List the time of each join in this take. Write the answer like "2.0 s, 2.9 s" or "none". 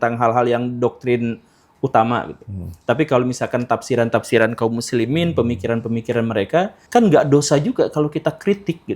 6.8 s